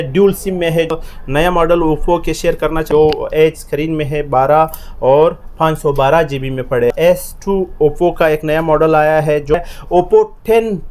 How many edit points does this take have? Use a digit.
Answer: 4